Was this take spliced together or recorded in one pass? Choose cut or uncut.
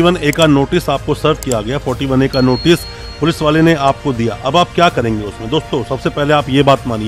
uncut